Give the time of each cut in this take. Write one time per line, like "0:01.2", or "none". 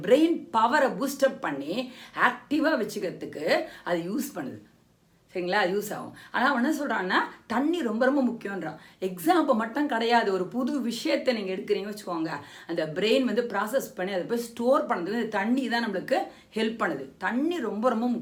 none